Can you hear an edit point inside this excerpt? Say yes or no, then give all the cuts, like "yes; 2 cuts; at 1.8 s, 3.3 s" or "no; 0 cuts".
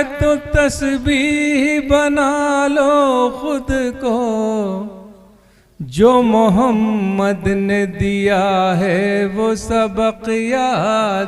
no; 0 cuts